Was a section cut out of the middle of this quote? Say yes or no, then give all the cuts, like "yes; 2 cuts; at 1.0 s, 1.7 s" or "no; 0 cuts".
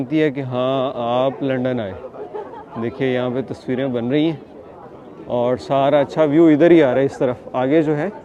no; 0 cuts